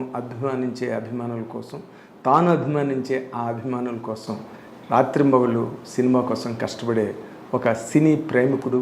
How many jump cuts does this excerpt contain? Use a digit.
0